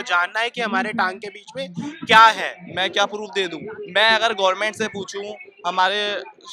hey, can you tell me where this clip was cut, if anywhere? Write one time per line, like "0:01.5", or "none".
0:02.6